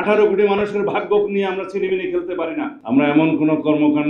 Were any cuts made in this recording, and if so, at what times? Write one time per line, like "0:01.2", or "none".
0:02.7